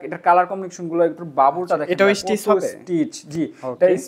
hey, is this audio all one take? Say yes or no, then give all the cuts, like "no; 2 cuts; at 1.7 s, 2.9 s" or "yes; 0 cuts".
yes; 0 cuts